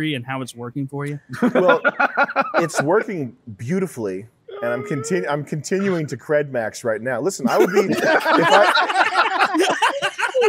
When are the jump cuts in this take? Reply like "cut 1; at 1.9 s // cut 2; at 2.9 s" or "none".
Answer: none